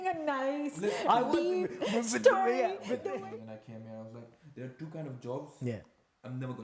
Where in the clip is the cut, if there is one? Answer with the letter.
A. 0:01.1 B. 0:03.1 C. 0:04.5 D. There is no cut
B